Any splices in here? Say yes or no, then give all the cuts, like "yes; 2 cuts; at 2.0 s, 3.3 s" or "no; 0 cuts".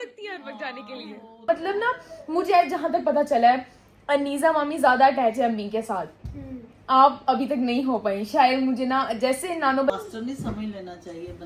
yes; 2 cuts; at 1.5 s, 9.9 s